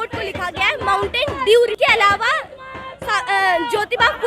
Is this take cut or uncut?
cut